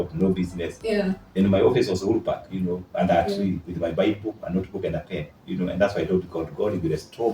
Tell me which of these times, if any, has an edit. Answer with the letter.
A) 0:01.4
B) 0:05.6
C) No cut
C